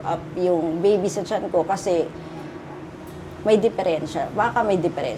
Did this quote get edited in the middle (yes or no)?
no